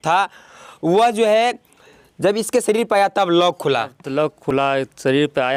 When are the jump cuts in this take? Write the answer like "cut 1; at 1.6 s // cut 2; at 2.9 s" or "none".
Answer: none